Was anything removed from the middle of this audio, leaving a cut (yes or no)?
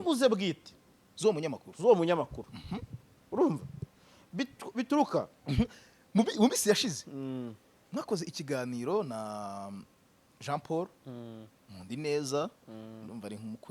yes